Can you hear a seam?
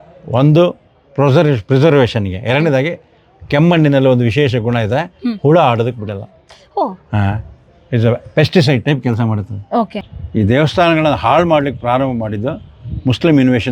yes; 1 cut; at 10.1 s

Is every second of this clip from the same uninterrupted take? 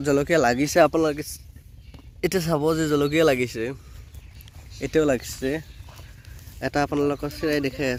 yes; 0 cuts

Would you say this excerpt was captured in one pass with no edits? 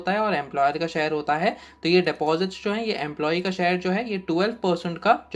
yes; 0 cuts

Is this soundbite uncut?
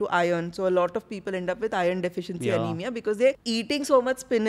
no; 1 cut; at 3.4 s

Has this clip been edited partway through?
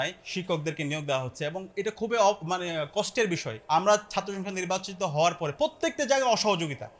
no; 0 cuts

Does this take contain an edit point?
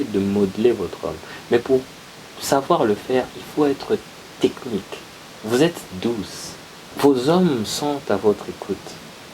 yes; 1 cut; at 6.9 s

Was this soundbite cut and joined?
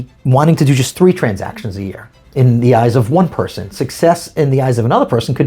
no; 0 cuts

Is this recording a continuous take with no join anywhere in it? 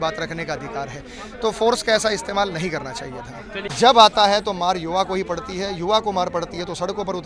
no; 1 cut; at 3.6 s

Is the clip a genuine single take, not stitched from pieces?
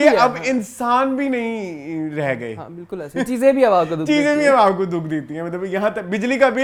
yes; 0 cuts

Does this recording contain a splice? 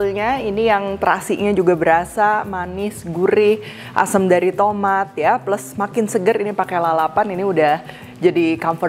no; 0 cuts

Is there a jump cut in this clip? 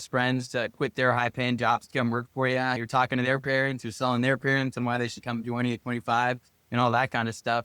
no; 0 cuts

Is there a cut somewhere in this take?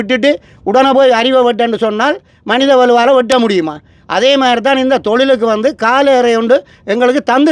no; 0 cuts

